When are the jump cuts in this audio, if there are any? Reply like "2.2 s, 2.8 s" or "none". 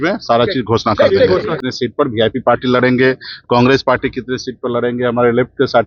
1.6 s